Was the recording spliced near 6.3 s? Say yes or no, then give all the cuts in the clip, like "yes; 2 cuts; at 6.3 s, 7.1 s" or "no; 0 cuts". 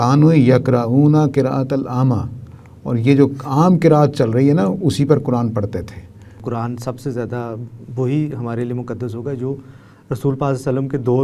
yes; 1 cut; at 6.3 s